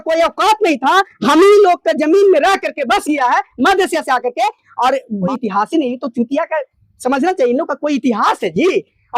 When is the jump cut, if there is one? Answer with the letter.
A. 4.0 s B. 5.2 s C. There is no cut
B